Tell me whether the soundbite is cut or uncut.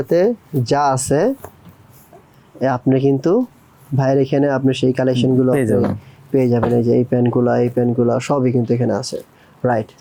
uncut